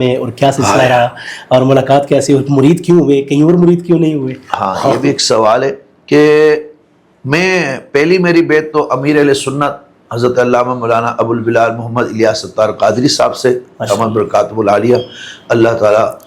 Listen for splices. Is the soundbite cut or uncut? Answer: uncut